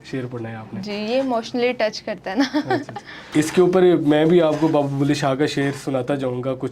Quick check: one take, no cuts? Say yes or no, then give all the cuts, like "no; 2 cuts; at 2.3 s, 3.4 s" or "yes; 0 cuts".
no; 1 cut; at 3.2 s